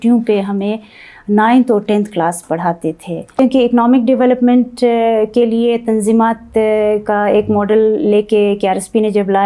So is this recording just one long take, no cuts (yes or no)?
no